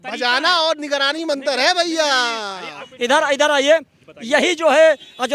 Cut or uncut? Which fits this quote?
cut